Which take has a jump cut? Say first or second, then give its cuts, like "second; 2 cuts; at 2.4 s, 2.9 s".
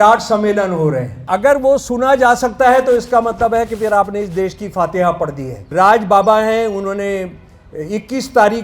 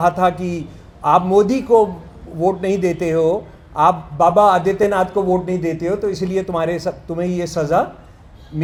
first; 2 cuts; at 1.1 s, 5.7 s